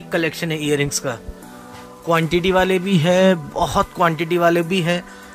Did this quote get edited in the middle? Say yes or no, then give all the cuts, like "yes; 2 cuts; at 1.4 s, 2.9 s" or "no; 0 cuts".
no; 0 cuts